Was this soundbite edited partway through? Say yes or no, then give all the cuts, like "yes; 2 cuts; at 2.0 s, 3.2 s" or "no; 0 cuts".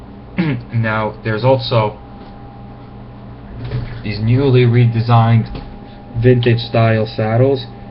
yes; 1 cut; at 5.5 s